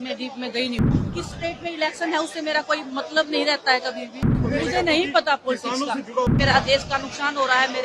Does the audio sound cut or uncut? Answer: cut